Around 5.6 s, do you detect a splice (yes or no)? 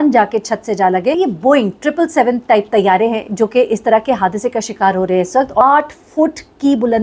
yes